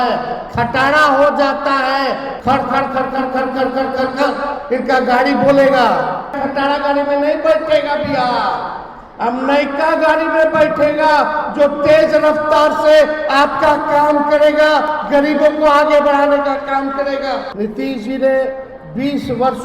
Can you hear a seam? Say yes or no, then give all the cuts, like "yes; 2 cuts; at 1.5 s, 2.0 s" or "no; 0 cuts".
yes; 3 cuts; at 2.3 s, 6.4 s, 17.5 s